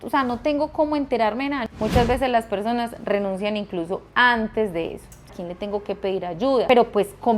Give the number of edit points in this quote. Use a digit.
3